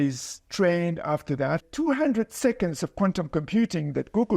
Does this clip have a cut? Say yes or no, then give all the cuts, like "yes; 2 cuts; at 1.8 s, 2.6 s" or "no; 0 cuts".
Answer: yes; 1 cut; at 1.6 s